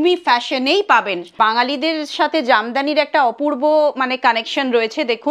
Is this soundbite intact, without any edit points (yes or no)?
no